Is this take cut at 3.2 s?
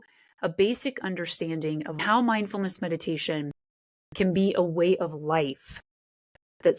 no; 1 cut; at 2.0 s

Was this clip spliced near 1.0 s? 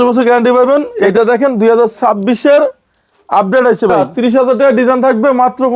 yes; 2 cuts; at 1.0 s, 4.0 s

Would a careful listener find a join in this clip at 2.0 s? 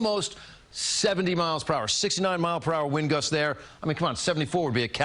yes; 1 cut; at 2.0 s

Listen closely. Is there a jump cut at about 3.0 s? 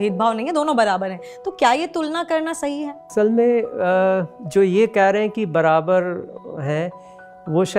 yes; 1 cut; at 3.0 s

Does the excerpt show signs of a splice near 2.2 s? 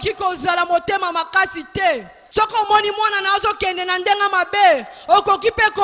yes; 1 cut; at 2.2 s

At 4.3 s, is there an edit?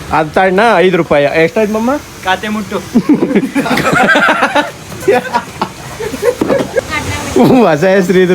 no; 1 cut; at 6.8 s

